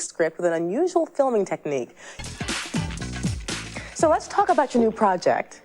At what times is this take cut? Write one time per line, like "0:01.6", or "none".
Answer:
0:02.1